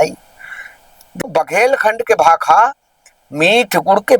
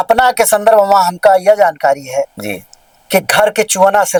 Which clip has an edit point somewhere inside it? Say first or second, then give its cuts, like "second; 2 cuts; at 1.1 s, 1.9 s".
first; 1 cut; at 1.2 s